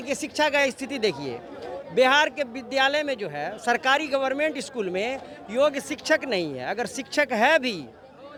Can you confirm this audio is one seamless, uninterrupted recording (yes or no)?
yes